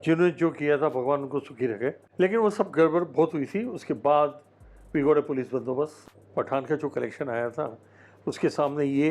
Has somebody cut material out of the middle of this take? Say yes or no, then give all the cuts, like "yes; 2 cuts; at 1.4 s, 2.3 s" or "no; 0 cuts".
yes; 2 cuts; at 2.0 s, 6.0 s